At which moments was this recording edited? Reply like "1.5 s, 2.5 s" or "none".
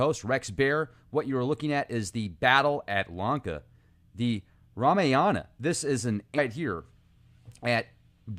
none